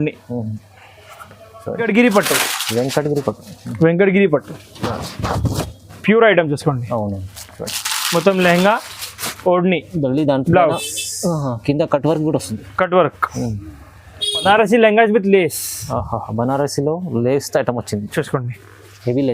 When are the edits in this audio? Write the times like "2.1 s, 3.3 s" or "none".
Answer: 1.8 s, 14.4 s